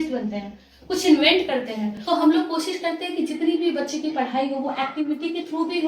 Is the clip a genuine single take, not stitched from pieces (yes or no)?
no